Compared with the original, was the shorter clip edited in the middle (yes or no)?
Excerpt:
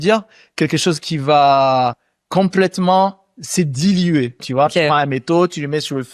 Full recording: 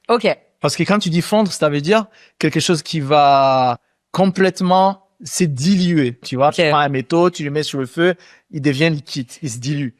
no